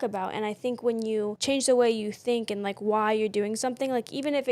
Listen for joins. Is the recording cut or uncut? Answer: cut